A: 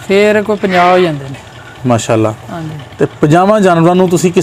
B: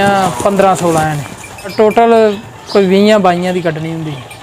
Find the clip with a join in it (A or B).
B